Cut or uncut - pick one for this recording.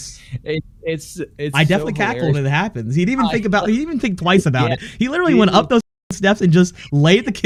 uncut